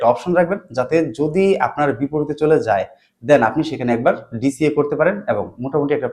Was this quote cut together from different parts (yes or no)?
no